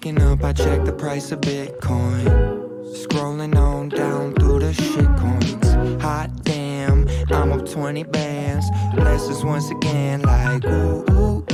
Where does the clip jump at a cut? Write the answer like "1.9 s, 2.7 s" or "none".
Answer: none